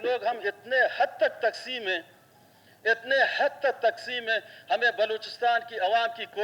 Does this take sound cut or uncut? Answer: uncut